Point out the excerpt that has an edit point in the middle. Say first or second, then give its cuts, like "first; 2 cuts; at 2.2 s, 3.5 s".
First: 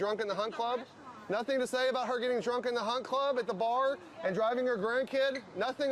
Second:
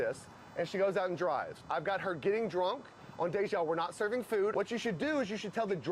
second; 1 cut; at 4.5 s